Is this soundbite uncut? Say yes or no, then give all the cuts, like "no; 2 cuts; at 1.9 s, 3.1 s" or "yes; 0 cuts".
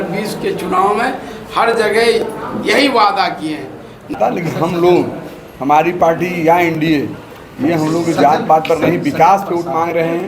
no; 1 cut; at 4.2 s